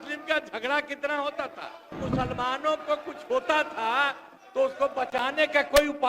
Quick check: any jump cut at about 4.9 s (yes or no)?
no